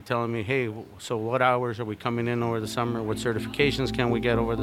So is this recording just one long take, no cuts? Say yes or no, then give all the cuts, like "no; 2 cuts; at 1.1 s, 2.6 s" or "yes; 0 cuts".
yes; 0 cuts